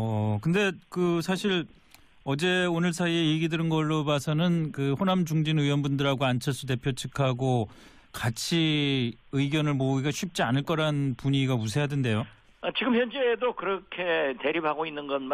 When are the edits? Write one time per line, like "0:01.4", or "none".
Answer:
none